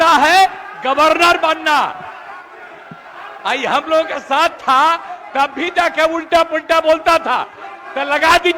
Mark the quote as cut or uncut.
uncut